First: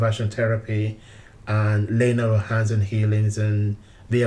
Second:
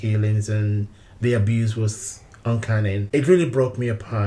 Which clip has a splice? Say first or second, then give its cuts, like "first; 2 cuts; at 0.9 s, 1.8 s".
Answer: second; 1 cut; at 3.1 s